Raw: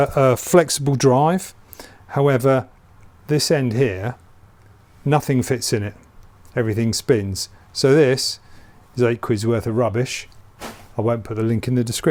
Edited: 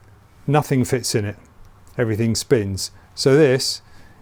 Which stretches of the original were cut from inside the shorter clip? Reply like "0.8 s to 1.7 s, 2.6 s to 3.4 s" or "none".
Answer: none